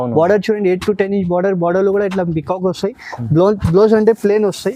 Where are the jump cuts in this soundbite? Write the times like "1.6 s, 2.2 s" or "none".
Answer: none